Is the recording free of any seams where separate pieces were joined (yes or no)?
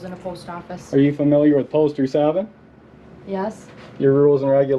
yes